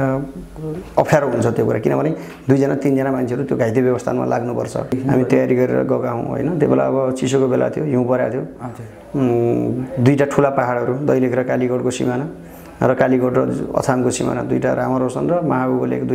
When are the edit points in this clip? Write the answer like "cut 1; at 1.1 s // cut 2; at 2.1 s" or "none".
cut 1; at 4.9 s

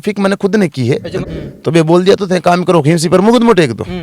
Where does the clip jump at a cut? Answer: cut 1; at 1.2 s

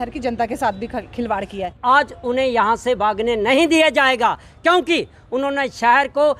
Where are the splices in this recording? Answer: cut 1; at 1.8 s

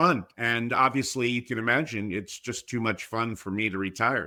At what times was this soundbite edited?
none

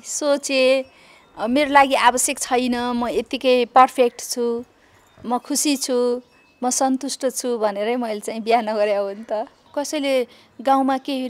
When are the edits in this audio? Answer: cut 1; at 9.6 s

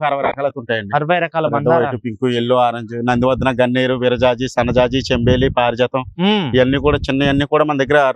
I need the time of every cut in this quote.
none

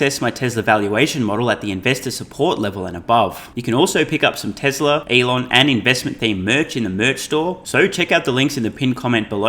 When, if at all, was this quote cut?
cut 1; at 3.5 s // cut 2; at 5.0 s // cut 3; at 7.6 s

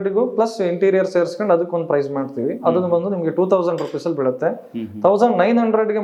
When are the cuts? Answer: none

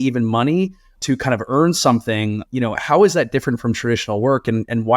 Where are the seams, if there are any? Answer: cut 1; at 0.9 s // cut 2; at 2.4 s

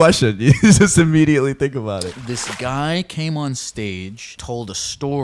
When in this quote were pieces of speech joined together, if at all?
cut 1; at 2.2 s // cut 2; at 4.4 s

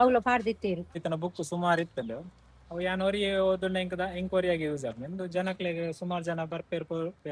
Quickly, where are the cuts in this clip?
cut 1; at 1.0 s

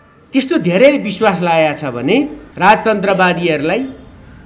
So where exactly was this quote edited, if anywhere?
cut 1; at 2.4 s

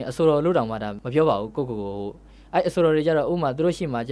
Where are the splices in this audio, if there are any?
cut 1; at 0.9 s

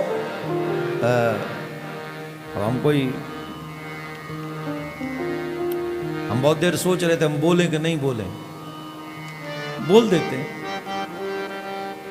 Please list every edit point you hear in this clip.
none

